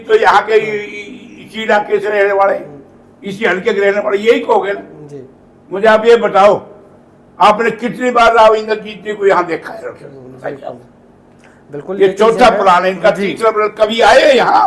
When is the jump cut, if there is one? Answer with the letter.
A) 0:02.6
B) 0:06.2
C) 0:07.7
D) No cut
D